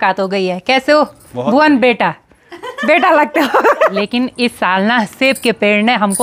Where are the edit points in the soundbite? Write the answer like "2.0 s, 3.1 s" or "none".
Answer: 3.9 s